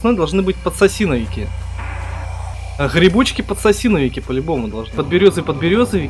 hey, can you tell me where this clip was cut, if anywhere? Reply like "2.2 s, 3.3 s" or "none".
2.6 s, 4.9 s